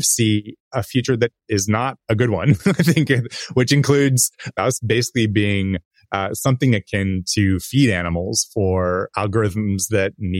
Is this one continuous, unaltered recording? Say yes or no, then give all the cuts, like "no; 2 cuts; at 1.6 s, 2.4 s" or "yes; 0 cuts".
no; 1 cut; at 4.5 s